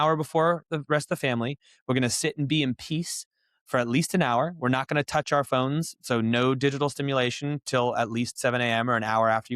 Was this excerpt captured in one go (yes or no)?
yes